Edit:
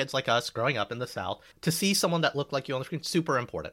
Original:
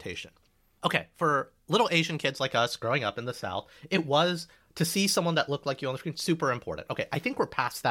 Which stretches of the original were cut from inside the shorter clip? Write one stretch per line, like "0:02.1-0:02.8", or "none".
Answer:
0:03.7-0:04.6